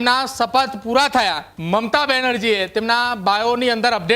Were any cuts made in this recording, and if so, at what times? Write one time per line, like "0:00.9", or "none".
0:01.5

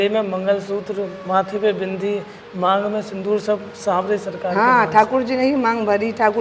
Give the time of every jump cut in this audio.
none

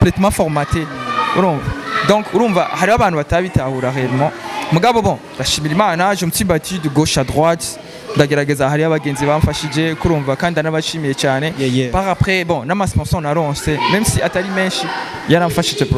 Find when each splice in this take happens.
none

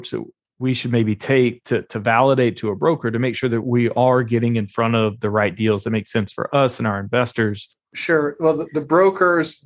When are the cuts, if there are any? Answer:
0:07.7

